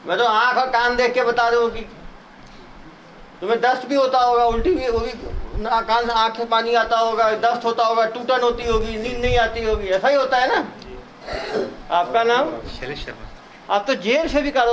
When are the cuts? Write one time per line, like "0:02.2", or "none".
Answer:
0:11.4